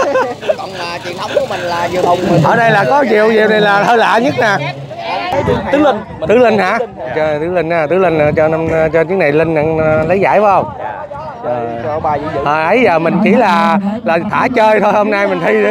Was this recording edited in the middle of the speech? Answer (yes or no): yes